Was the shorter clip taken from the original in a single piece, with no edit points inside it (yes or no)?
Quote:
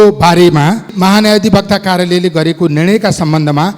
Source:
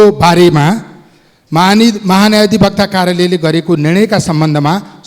no